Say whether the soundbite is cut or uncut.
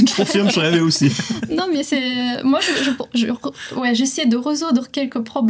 uncut